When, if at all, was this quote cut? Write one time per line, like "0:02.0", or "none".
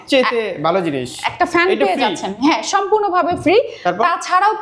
none